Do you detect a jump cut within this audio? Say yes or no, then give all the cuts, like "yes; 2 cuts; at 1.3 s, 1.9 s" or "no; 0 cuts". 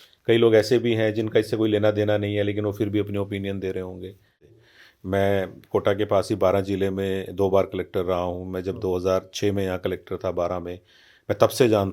yes; 1 cut; at 4.5 s